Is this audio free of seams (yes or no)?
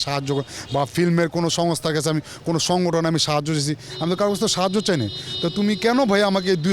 yes